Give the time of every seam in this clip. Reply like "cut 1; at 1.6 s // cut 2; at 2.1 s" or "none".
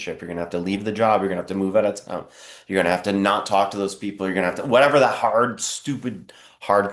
none

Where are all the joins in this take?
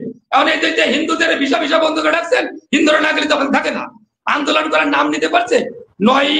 none

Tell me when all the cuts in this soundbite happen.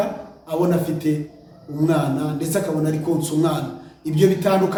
none

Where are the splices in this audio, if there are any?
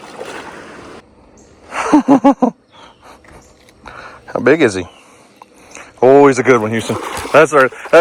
cut 1; at 1.0 s

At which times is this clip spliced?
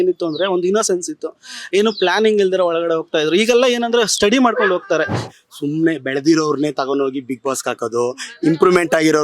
cut 1; at 5.2 s

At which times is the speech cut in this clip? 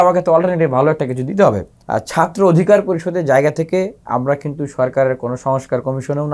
cut 1; at 1.7 s

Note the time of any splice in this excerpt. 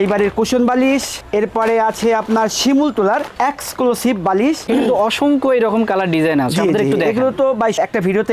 cut 1; at 4.6 s

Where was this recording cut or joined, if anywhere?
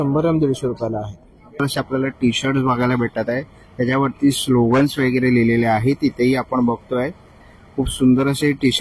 cut 1; at 1.6 s

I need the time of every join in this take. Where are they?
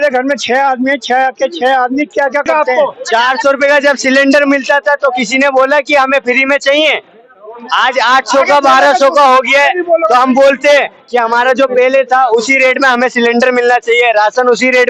cut 1; at 2.4 s

